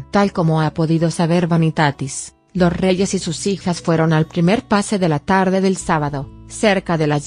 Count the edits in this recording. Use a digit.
1